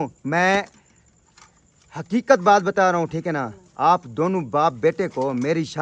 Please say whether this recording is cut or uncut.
uncut